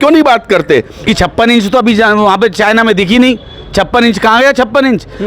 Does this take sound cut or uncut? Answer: cut